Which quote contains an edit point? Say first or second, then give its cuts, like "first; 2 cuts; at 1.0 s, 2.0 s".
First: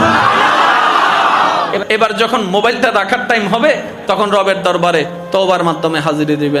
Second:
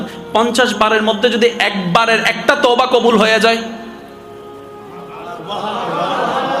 first; 1 cut; at 1.8 s